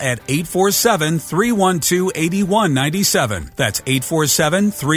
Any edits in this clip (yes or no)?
yes